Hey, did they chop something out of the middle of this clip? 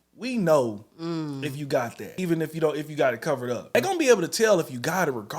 yes; 2 cuts; at 2.0 s, 3.8 s

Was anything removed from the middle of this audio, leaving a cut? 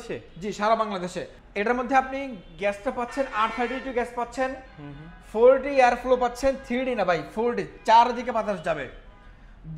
no; 0 cuts

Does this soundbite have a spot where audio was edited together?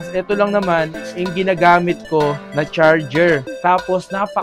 no; 0 cuts

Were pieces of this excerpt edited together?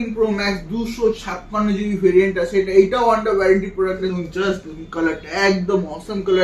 yes; 1 cut; at 4.1 s

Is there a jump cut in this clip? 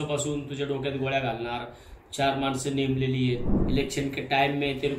yes; 1 cut; at 3.5 s

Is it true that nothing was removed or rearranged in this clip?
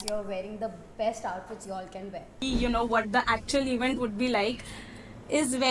no; 1 cut; at 2.4 s

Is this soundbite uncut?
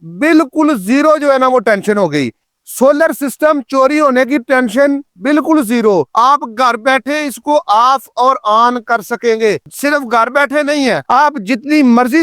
no; 1 cut; at 6.1 s

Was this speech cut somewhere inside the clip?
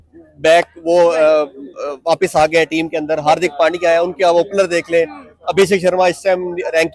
no; 0 cuts

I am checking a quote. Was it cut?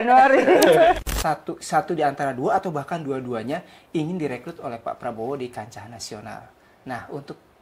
yes; 1 cut; at 1.0 s

